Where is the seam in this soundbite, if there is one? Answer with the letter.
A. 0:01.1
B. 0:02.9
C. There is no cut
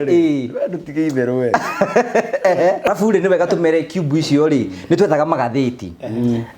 B